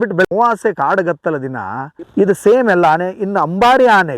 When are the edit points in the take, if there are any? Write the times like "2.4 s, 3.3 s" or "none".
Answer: 1.8 s